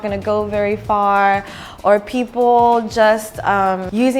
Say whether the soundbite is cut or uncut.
uncut